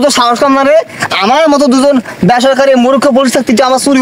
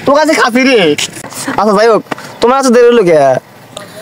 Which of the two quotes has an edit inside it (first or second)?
second